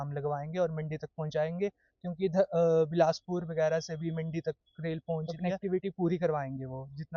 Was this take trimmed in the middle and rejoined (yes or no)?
yes